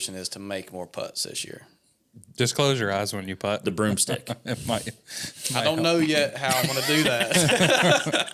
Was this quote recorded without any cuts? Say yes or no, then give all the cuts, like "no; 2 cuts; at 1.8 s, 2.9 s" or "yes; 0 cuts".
yes; 0 cuts